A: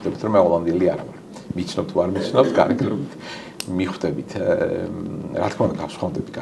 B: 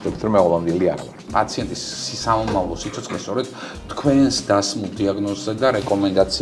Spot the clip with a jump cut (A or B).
B